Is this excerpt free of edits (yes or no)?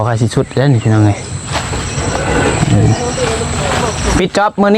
yes